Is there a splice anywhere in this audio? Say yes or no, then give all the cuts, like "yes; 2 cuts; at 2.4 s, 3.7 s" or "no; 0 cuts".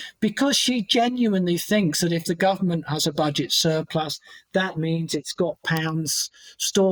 no; 0 cuts